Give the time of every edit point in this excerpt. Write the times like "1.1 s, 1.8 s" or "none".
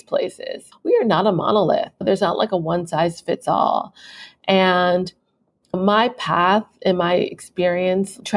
none